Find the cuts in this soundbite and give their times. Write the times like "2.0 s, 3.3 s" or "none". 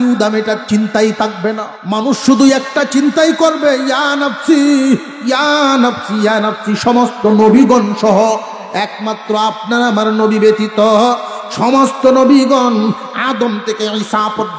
1.7 s